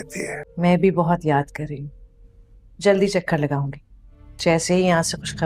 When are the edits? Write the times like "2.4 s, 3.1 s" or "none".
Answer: none